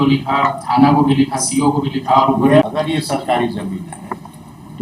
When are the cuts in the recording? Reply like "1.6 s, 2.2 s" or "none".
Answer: 2.6 s